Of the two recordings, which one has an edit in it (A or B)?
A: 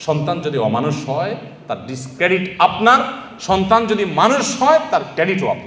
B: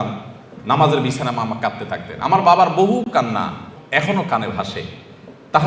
B